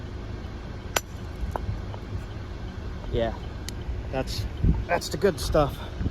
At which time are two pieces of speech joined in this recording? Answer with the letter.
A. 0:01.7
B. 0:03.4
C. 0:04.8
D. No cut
C